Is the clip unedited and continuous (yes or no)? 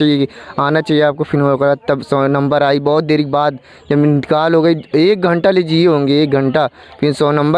yes